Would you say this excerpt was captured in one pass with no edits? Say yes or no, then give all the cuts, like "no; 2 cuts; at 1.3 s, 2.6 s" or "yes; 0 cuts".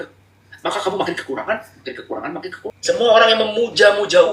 no; 1 cut; at 2.8 s